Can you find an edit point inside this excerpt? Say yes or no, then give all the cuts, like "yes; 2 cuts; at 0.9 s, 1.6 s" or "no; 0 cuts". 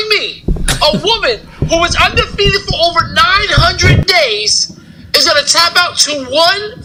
no; 0 cuts